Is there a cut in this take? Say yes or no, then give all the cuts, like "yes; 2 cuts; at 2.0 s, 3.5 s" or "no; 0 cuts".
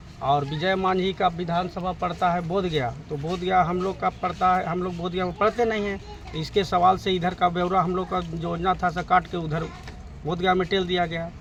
no; 0 cuts